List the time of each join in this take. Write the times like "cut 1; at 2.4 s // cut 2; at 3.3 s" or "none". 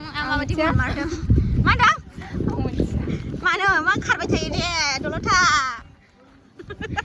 none